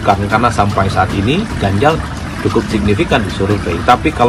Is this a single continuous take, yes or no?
yes